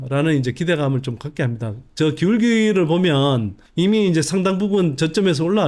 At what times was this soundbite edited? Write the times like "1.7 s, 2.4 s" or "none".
none